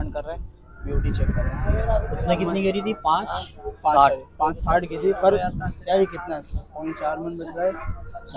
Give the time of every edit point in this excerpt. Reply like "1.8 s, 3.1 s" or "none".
none